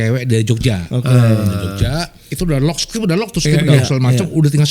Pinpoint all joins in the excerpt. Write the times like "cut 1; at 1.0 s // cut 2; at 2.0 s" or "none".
cut 1; at 2.2 s